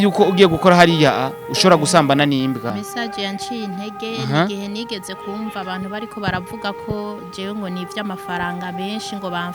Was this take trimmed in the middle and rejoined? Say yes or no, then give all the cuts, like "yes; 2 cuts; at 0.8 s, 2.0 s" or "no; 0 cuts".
yes; 1 cut; at 2.7 s